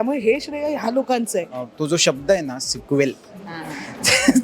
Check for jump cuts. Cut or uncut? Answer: cut